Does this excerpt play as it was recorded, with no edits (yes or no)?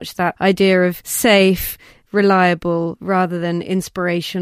no